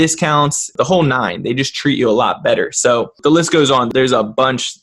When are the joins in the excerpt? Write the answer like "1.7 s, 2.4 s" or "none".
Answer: 3.1 s